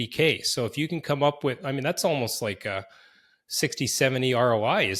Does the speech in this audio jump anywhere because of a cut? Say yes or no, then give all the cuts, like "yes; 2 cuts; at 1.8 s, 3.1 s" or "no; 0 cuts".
no; 0 cuts